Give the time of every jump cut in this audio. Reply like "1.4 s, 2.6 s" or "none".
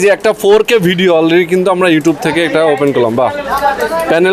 none